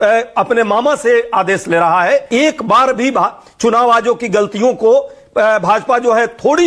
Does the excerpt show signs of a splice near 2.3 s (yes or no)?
yes